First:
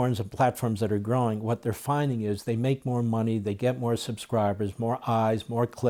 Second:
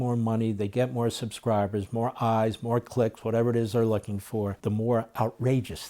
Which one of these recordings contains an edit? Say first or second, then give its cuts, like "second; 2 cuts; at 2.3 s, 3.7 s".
second; 1 cut; at 4.6 s